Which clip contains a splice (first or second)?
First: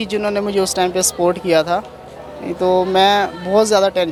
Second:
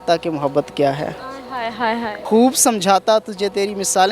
second